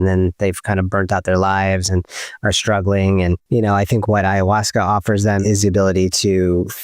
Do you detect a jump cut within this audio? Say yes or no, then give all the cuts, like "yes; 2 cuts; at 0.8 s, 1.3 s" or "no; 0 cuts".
yes; 2 cuts; at 3.4 s, 5.4 s